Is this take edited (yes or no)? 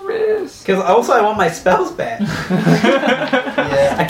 no